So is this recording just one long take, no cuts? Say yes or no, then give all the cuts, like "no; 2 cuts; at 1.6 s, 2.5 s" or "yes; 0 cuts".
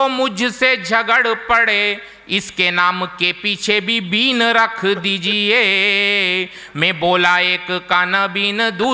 yes; 0 cuts